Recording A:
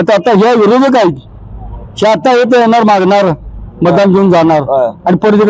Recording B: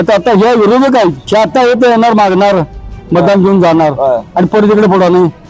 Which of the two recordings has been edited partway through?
B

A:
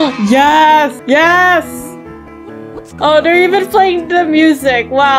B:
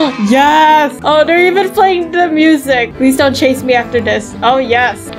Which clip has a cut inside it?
B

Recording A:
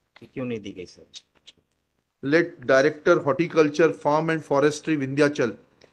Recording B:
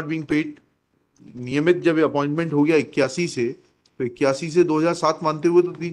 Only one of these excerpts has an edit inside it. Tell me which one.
B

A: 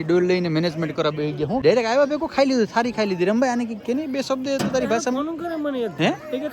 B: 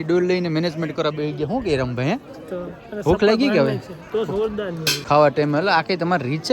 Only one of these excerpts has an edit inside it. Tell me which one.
A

